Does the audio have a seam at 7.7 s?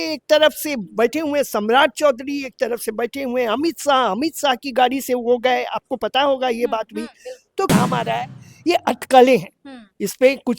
yes; 1 cut; at 7.7 s

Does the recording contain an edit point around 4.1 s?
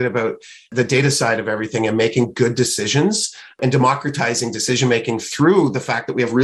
no; 0 cuts

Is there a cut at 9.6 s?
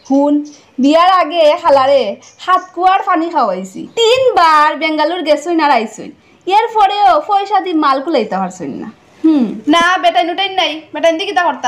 yes; 1 cut; at 9.6 s

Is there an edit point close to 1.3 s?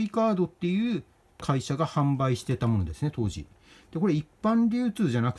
yes; 1 cut; at 1.3 s

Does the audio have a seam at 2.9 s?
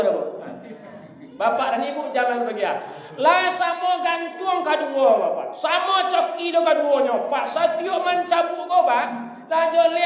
no; 0 cuts

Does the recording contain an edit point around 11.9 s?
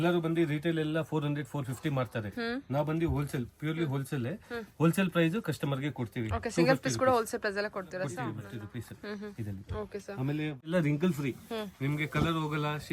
no; 2 cuts; at 8.5 s, 10.7 s

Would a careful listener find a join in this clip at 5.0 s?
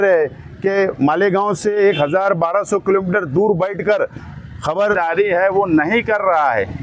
yes; 1 cut; at 5.0 s

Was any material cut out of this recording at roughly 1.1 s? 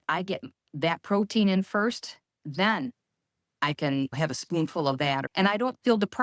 no; 3 cuts; at 2.4 s, 4.1 s, 5.3 s

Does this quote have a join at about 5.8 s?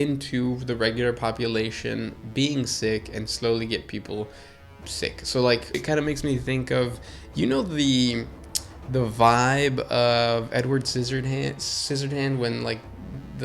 yes; 1 cut; at 5.8 s

